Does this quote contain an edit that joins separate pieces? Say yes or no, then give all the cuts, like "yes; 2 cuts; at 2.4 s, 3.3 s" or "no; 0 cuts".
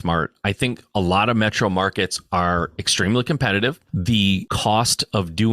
yes; 1 cut; at 4.3 s